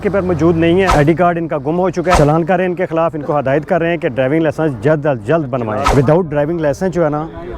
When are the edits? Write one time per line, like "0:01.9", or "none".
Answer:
0:00.9
0:02.2
0:05.9